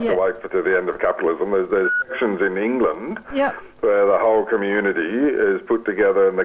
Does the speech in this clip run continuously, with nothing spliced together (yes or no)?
yes